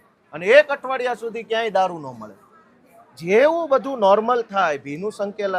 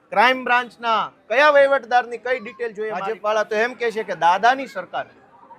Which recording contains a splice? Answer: second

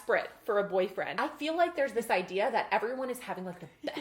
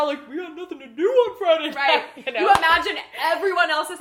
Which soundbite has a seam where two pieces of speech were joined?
first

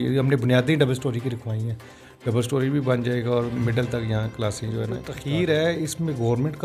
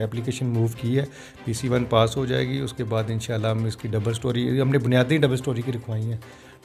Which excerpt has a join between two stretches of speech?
first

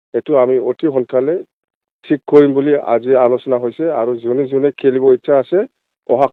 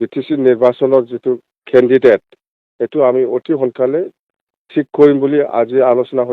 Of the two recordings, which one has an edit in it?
second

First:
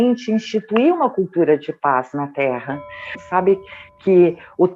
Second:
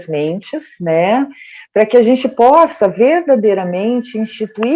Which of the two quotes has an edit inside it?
first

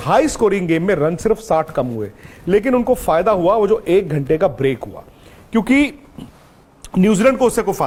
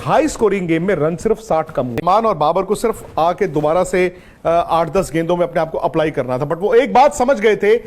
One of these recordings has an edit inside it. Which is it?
second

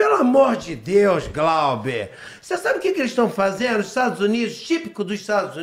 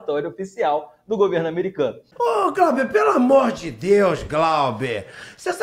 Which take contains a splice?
second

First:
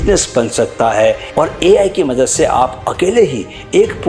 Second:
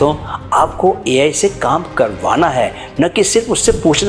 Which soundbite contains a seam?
first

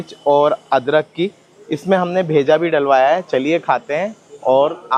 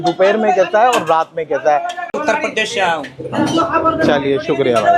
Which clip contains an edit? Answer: second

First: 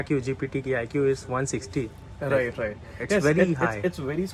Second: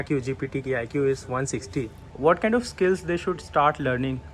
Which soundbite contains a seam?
second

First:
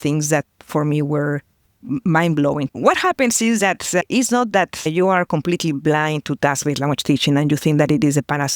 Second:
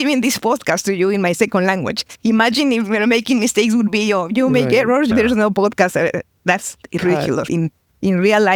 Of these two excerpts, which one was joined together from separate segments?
first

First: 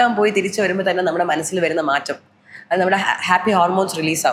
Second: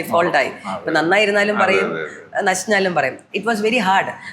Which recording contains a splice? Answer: second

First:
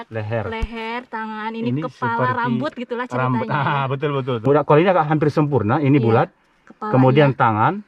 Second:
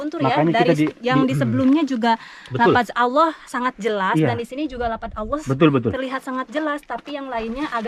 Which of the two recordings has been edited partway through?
first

